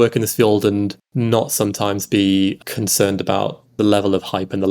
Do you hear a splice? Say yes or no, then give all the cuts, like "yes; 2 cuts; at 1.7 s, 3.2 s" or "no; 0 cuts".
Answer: yes; 3 cuts; at 1.0 s, 2.6 s, 3.7 s